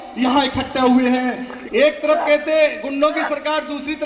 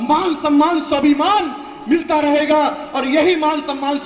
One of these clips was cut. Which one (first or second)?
first